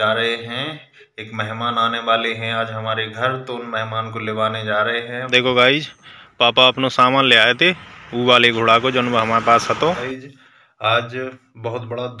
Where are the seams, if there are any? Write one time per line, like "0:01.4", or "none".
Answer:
0:05.1
0:10.0